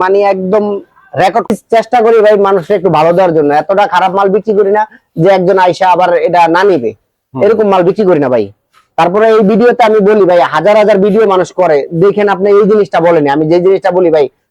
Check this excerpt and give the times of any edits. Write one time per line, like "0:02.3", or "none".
0:01.5